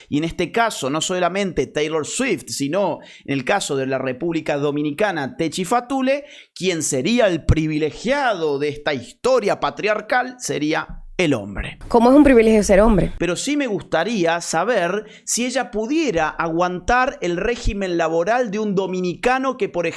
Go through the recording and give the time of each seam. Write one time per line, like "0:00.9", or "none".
0:13.1

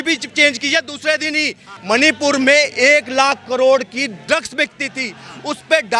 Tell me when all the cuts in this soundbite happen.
0:01.7

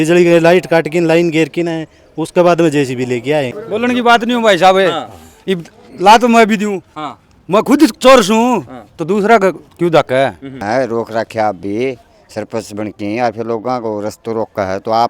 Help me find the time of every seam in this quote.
0:03.6
0:10.6

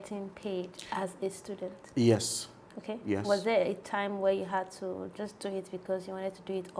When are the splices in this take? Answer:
none

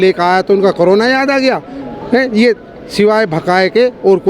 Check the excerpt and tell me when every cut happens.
none

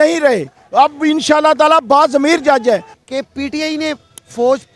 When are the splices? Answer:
0:02.9

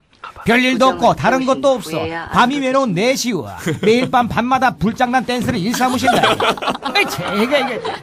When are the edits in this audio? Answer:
0:06.6

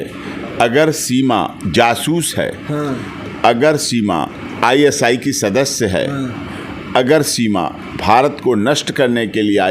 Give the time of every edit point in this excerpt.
0:01.6
0:04.4
0:07.8

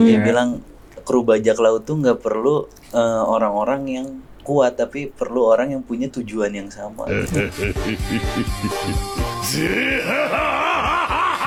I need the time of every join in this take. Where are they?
none

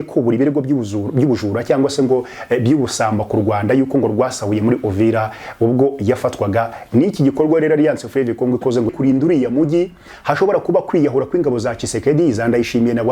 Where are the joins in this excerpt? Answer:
0:08.9

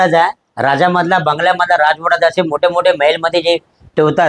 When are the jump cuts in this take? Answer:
none

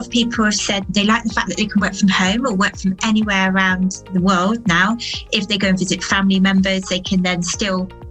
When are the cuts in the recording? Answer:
0:00.9

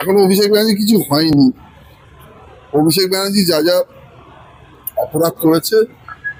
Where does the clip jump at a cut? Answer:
none

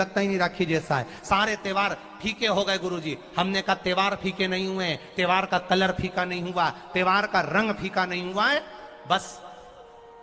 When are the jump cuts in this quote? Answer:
none

